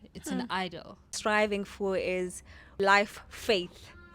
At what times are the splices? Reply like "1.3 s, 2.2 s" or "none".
1.1 s, 2.7 s

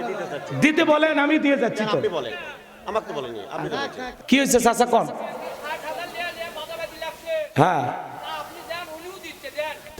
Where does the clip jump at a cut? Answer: 4.0 s

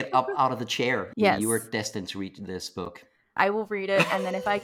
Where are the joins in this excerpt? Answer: 1.0 s, 3.3 s

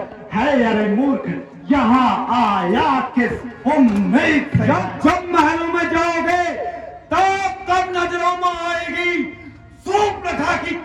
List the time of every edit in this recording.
4.6 s

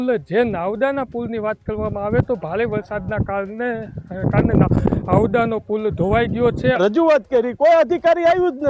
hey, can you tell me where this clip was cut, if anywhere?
6.8 s

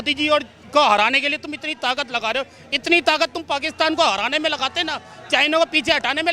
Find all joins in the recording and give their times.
none

